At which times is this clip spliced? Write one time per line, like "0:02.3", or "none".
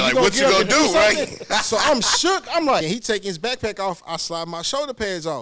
0:02.8